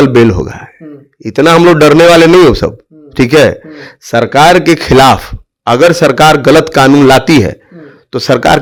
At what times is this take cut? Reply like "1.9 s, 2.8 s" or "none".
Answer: none